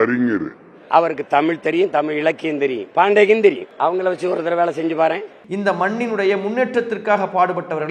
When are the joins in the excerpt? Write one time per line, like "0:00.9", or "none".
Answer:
0:03.7
0:05.4